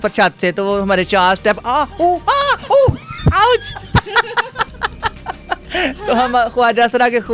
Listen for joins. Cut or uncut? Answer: uncut